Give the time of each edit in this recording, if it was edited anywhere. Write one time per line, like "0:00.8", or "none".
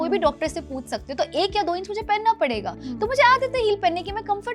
none

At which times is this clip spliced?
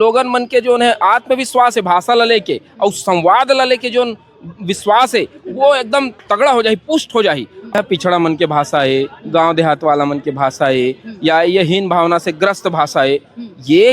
0:07.8

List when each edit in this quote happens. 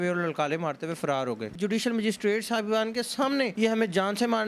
0:01.5
0:03.5

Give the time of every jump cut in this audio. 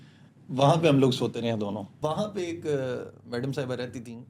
0:01.9

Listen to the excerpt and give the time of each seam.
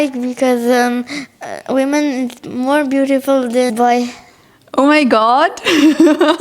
0:03.7

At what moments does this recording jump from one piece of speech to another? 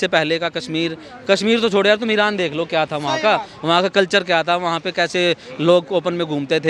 none

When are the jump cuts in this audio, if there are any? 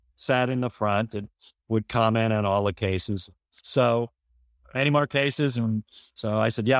0:03.7

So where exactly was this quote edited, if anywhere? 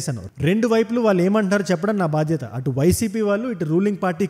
none

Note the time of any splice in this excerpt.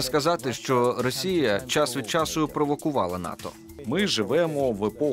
0:03.7

